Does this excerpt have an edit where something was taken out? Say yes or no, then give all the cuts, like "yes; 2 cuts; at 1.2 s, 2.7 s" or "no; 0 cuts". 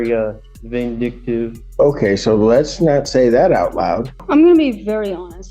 yes; 2 cuts; at 1.6 s, 4.2 s